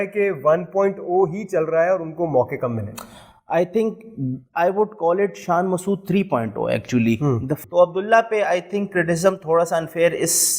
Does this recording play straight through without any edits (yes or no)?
no